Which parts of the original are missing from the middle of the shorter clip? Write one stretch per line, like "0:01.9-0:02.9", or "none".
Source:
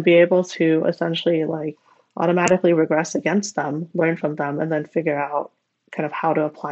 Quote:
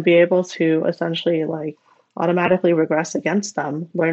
none